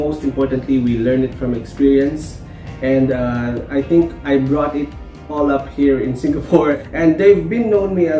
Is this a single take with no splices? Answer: no; 1 cut; at 6.8 s

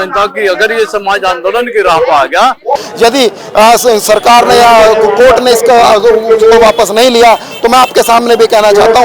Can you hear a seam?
yes; 1 cut; at 2.9 s

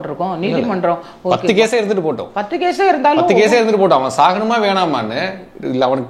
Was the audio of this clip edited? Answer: no; 0 cuts

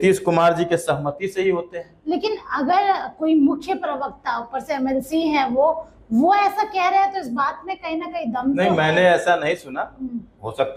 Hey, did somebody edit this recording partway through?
no; 0 cuts

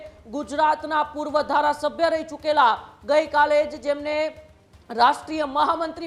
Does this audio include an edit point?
no; 0 cuts

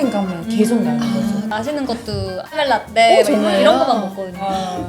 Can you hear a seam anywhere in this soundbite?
yes; 2 cuts; at 1.5 s, 2.6 s

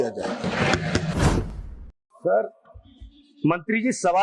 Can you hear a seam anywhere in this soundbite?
yes; 1 cut; at 1.5 s

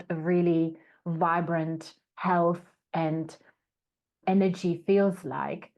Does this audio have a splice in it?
yes; 1 cut; at 4.2 s

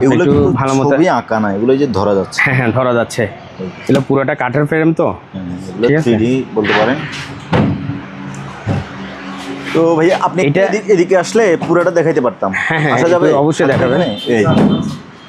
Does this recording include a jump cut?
no; 0 cuts

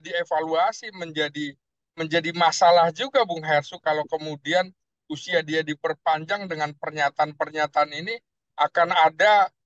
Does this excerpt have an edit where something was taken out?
no; 0 cuts

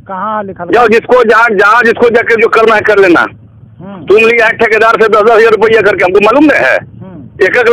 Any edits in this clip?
no; 0 cuts

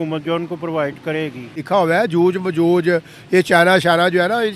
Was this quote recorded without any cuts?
no; 1 cut; at 1.6 s

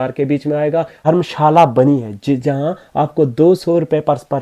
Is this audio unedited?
no; 1 cut; at 1.0 s

